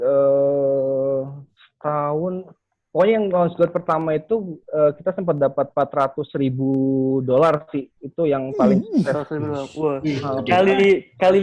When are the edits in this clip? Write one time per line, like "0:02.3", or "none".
none